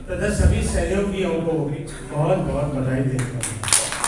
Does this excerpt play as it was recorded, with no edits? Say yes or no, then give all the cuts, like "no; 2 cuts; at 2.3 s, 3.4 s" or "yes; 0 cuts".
yes; 0 cuts